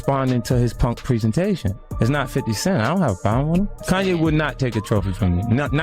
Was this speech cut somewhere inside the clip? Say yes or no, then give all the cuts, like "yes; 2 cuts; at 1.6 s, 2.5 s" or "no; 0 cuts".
yes; 2 cuts; at 1.8 s, 3.8 s